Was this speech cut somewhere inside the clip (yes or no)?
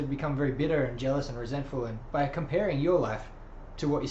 yes